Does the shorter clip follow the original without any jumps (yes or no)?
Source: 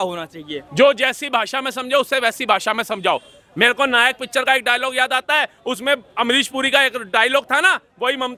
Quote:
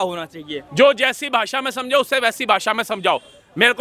yes